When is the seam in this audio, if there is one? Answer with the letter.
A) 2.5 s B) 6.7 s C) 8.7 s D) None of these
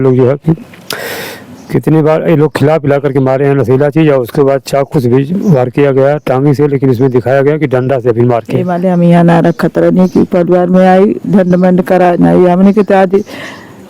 C